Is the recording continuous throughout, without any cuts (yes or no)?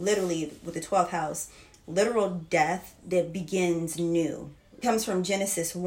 no